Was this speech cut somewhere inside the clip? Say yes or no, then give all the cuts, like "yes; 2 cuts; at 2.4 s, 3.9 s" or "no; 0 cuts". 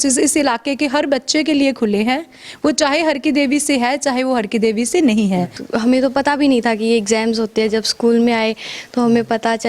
yes; 1 cut; at 5.6 s